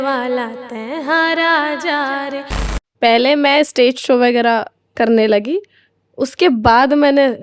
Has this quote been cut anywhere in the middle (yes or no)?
yes